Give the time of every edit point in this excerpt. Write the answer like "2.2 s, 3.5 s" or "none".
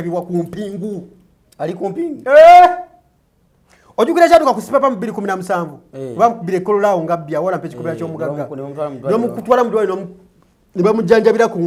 none